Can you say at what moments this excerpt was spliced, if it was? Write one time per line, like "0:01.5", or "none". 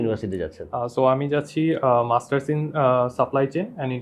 none